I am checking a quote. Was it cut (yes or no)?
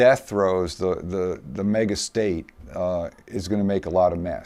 no